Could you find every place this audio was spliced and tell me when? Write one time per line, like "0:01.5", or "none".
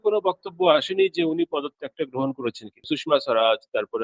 0:02.8

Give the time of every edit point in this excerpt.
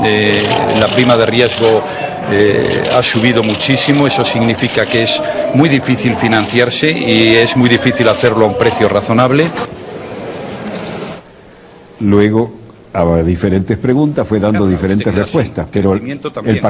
none

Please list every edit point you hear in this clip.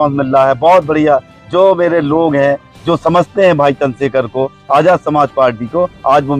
none

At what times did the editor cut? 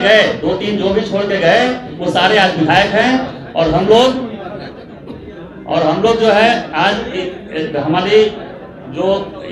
none

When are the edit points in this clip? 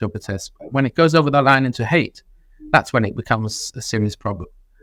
none

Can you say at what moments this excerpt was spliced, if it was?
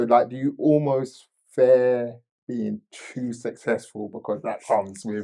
none

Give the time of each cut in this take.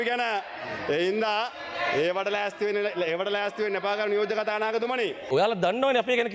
0:05.3

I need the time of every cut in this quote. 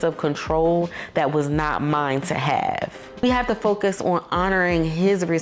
0:03.2

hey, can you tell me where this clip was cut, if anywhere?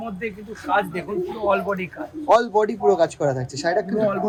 none

